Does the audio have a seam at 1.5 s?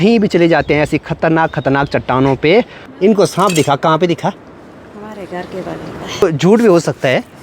no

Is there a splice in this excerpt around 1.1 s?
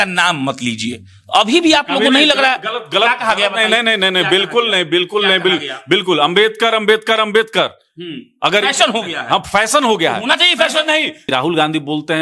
no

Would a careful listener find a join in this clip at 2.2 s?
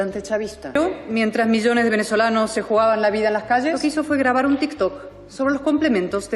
no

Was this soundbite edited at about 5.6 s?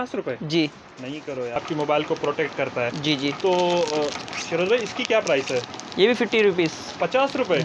no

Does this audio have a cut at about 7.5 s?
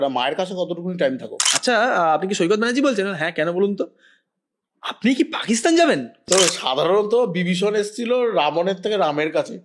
no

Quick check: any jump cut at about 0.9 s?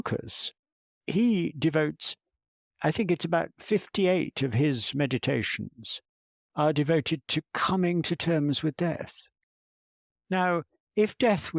yes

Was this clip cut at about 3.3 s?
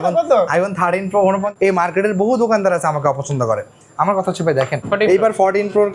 no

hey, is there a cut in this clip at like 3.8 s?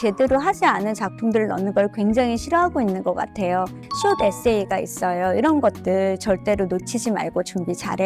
yes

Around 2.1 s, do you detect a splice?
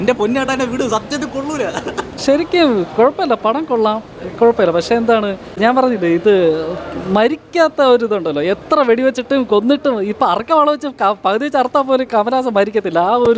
no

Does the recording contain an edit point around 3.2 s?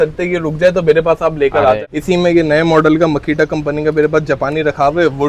no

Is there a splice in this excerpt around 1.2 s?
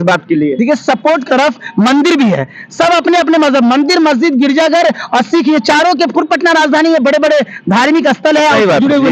yes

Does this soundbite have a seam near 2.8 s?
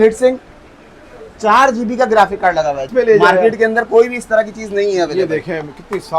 yes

